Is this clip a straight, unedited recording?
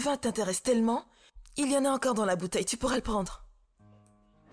yes; 0 cuts

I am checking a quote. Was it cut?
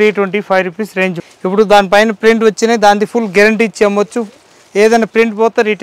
yes; 1 cut; at 1.3 s

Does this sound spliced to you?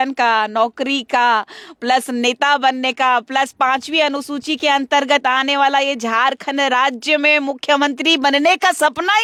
no; 0 cuts

